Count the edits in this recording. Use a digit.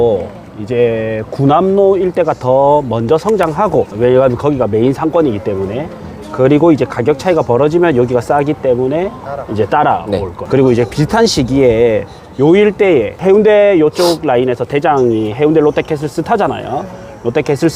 3